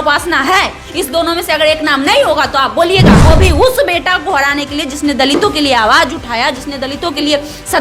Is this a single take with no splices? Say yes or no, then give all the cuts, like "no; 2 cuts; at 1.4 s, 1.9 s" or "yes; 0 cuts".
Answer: no; 1 cut; at 3.1 s